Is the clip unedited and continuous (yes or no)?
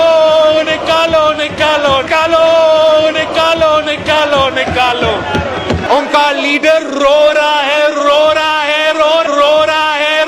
yes